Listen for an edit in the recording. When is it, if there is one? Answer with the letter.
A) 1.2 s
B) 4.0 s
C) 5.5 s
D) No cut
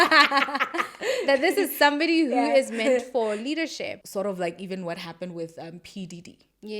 B